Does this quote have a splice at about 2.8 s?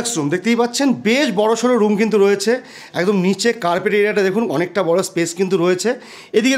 no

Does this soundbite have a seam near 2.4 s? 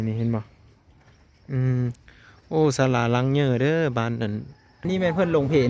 no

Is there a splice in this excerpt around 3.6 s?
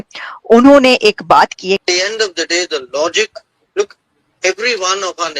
no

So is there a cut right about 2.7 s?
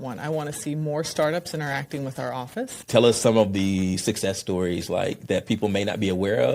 yes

